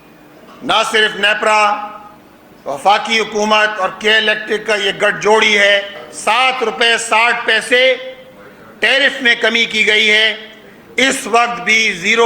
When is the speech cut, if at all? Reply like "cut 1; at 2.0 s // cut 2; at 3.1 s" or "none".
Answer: cut 1; at 6.0 s